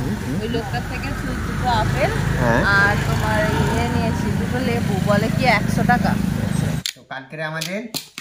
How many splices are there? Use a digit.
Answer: 1